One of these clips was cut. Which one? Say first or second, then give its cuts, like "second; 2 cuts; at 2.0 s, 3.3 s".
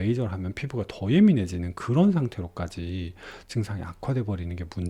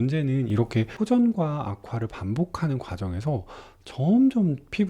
second; 1 cut; at 0.9 s